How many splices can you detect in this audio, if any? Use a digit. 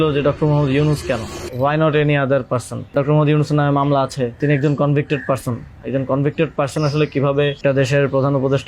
4